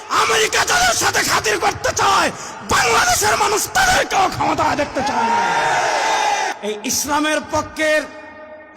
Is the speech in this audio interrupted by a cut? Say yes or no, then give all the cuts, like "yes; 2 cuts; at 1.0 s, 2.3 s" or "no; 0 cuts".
yes; 1 cut; at 6.6 s